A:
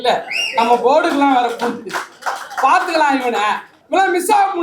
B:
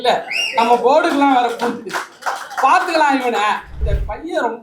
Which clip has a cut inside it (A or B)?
B